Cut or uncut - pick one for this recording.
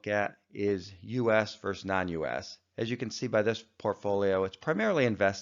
cut